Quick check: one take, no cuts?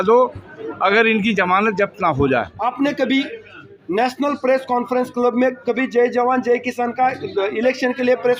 no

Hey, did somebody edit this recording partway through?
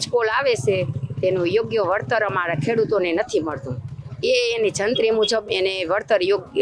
no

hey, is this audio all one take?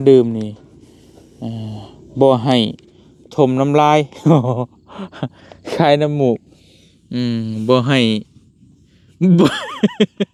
yes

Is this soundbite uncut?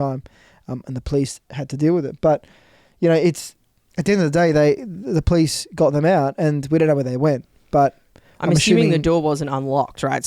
yes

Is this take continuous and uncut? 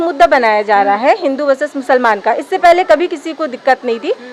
yes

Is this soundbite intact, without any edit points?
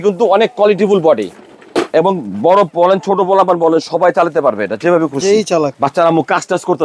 no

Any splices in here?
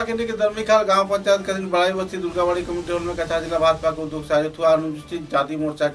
no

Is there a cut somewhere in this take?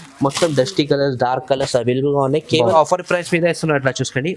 yes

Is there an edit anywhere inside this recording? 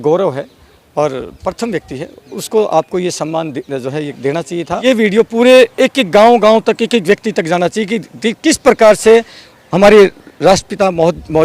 yes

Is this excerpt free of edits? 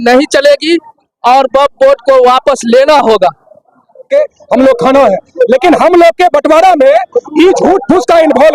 no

